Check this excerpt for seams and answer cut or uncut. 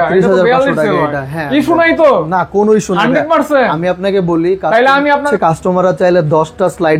cut